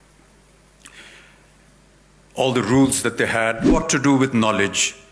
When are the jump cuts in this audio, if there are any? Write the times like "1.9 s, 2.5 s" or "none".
3.7 s